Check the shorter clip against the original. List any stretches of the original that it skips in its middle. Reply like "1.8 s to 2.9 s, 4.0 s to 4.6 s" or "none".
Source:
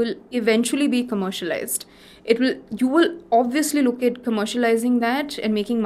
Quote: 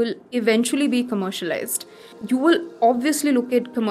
2.1 s to 2.6 s